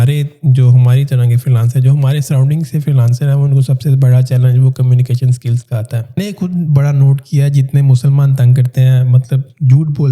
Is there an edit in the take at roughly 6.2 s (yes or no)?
yes